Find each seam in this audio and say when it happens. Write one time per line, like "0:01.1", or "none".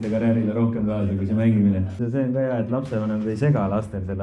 0:01.9